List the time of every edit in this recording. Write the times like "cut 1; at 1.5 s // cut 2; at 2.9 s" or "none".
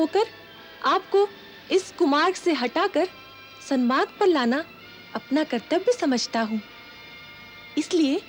none